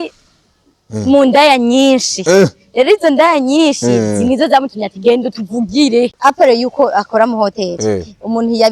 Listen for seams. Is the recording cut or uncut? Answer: cut